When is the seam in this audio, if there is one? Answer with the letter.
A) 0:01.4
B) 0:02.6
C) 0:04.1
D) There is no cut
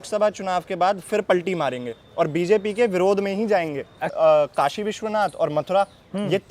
C